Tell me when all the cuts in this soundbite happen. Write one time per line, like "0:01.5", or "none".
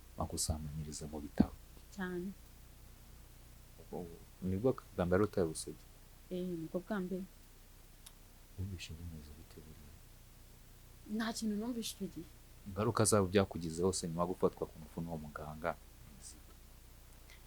none